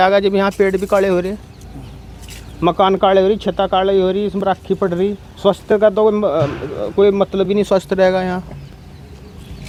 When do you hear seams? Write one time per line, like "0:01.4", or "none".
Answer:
none